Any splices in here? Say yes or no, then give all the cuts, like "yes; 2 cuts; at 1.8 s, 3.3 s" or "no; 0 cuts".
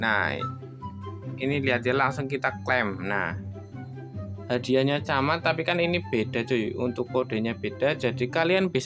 no; 0 cuts